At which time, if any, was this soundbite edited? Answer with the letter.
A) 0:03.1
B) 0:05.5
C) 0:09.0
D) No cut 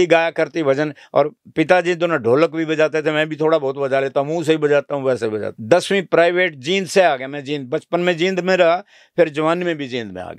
B